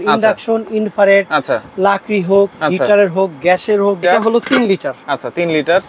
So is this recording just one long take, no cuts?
no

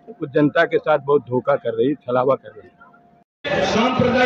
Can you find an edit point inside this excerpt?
yes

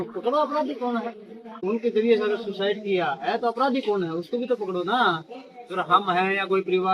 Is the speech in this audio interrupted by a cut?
yes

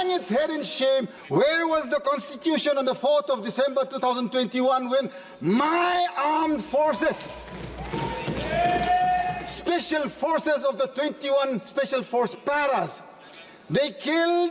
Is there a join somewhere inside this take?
yes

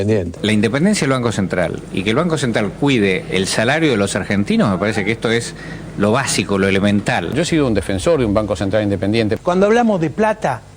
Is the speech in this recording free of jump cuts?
no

